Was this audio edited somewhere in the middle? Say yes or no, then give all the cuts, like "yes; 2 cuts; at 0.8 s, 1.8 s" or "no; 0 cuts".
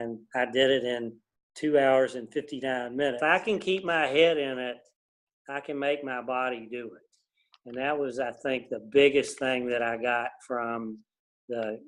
yes; 1 cut; at 3.2 s